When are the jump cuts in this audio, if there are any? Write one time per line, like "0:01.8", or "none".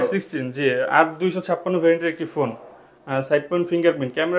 none